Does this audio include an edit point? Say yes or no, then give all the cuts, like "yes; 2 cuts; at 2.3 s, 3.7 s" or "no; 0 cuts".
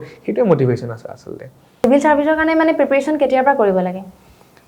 yes; 1 cut; at 1.8 s